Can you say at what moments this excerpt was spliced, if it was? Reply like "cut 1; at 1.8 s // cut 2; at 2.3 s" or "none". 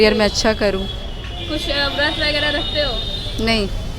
none